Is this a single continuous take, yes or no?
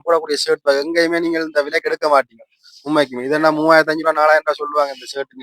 yes